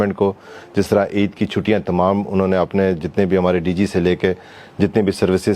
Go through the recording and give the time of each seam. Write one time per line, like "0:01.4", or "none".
none